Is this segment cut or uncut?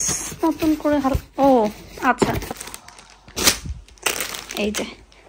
cut